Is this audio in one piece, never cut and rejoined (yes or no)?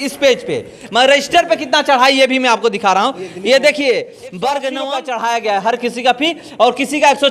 no